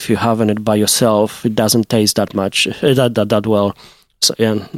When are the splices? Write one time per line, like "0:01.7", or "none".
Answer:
none